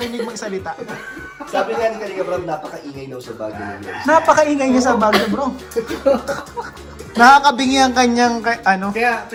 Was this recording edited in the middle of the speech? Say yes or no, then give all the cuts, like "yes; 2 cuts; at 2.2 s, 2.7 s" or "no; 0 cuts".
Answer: no; 0 cuts